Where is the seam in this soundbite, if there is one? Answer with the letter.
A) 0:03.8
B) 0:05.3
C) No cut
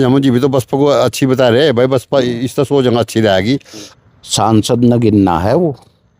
A